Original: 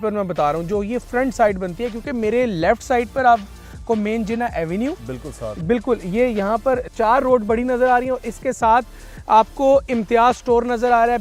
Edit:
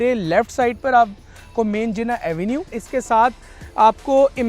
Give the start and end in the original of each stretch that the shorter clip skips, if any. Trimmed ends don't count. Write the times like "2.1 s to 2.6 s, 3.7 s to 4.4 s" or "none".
5.1 s to 8.3 s